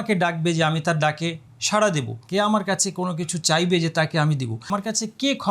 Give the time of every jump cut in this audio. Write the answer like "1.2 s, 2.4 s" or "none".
2.2 s, 4.7 s